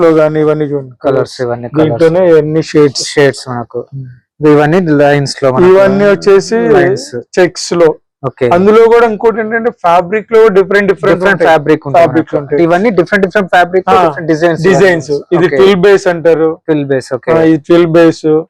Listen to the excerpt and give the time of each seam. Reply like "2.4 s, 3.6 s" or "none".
none